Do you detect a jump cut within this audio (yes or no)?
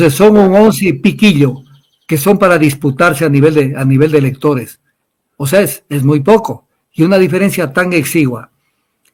no